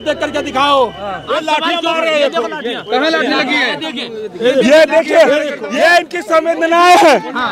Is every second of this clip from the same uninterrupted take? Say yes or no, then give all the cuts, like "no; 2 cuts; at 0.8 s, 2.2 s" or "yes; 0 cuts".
no; 2 cuts; at 1.2 s, 5.6 s